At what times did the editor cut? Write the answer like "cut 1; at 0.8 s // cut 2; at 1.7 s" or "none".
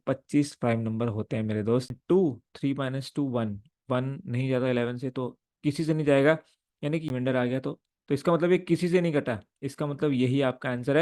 cut 1; at 1.9 s // cut 2; at 7.0 s